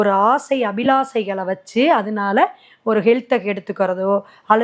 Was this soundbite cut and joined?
no; 0 cuts

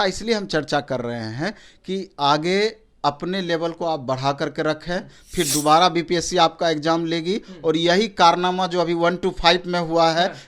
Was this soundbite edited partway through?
no; 0 cuts

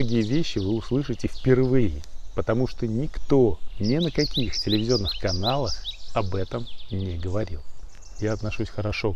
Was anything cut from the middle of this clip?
yes; 2 cuts; at 3.7 s, 8.0 s

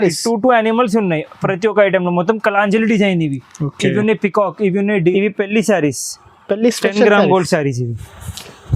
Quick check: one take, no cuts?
no; 1 cut; at 5.0 s

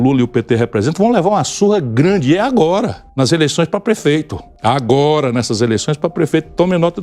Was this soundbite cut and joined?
yes; 2 cuts; at 3.0 s, 4.4 s

